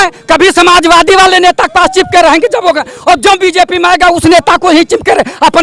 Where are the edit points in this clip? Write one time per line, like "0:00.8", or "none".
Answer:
none